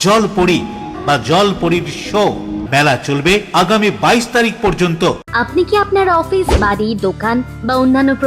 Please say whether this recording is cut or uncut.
cut